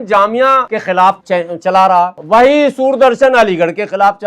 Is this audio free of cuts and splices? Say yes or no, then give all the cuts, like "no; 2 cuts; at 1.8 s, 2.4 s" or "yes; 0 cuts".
no; 2 cuts; at 1.0 s, 2.2 s